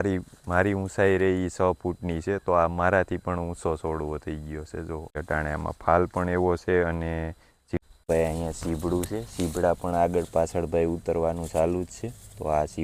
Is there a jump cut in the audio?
yes; 2 cuts; at 5.2 s, 7.6 s

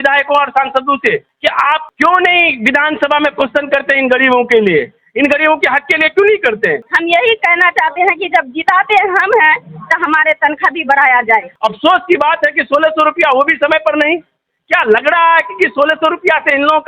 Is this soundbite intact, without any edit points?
no; 2 cuts; at 6.9 s, 11.5 s

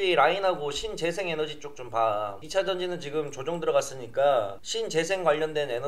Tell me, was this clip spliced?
no; 0 cuts

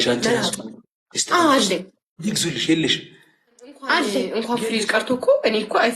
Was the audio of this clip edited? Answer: yes; 1 cut; at 4.4 s

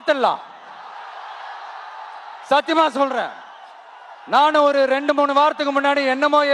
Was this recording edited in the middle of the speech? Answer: no; 0 cuts

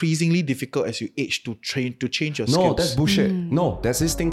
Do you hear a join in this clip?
no; 0 cuts

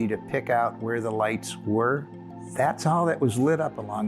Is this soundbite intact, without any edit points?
no; 1 cut; at 2.2 s

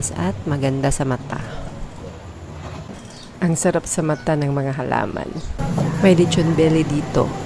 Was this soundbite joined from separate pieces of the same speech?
yes; 2 cuts; at 2.9 s, 5.6 s

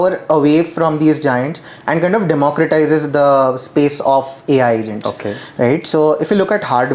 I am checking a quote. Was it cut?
no; 0 cuts

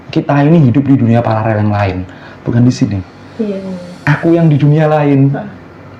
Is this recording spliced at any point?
no; 0 cuts

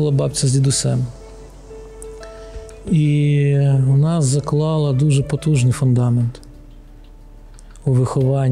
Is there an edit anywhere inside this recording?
no; 0 cuts

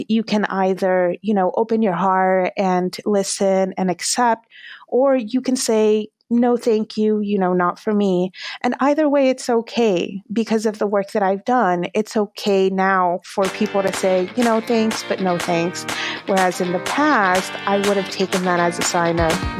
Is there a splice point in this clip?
no; 0 cuts

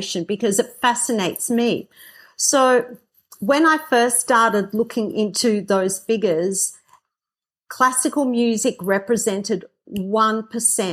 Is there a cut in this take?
no; 0 cuts

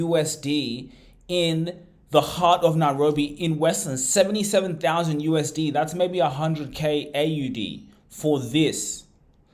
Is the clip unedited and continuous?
yes; 0 cuts

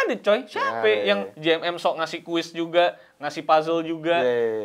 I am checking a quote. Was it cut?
no; 0 cuts

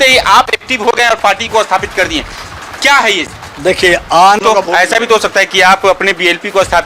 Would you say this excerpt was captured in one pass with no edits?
no; 1 cut; at 4.4 s

